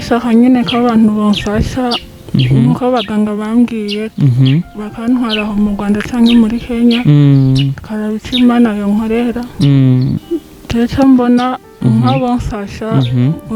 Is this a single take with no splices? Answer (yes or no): no